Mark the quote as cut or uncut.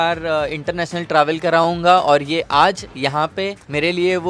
uncut